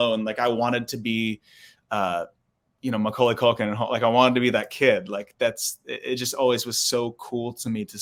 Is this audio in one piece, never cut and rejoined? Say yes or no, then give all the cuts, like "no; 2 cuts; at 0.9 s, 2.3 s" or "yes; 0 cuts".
yes; 0 cuts